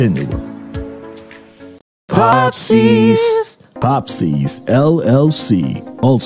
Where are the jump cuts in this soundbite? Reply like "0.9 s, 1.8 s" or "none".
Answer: 2.3 s